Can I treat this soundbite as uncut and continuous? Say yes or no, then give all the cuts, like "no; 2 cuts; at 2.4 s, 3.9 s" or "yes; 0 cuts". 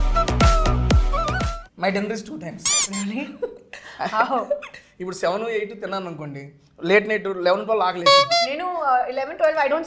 no; 1 cut; at 1.5 s